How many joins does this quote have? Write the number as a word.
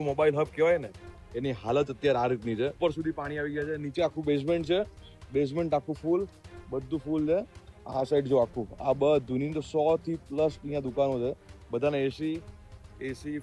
one